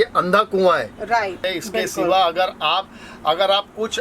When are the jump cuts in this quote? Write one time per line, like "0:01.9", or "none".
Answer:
0:01.5

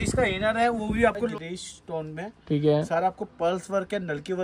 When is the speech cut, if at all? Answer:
0:01.3

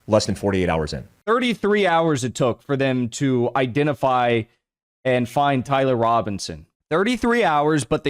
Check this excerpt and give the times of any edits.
0:01.1

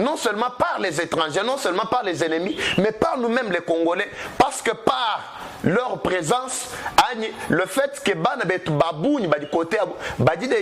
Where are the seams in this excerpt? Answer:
none

